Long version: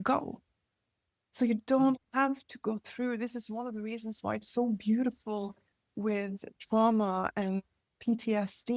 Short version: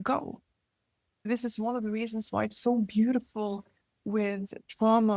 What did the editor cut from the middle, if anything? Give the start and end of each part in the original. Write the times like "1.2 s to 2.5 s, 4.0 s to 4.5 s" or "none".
1.3 s to 3.2 s